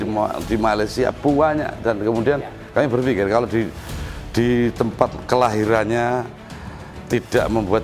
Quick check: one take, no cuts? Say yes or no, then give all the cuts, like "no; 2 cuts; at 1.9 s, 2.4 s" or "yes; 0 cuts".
yes; 0 cuts